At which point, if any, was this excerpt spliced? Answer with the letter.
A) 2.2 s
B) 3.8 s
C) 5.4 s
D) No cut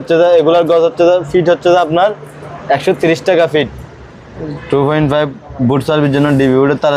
B